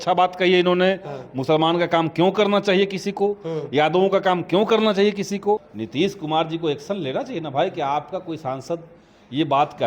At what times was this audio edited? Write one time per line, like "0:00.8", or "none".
0:05.7